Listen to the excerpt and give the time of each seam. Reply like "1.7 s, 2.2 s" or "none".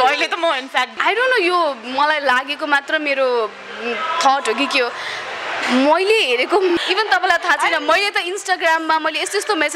0.9 s, 6.8 s